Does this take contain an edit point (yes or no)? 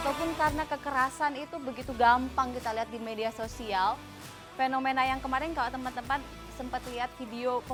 no